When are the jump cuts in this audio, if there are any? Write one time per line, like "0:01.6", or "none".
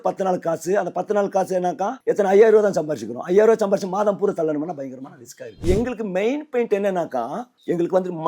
0:02.0
0:05.6